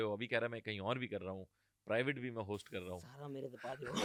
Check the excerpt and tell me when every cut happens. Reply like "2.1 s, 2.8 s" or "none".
none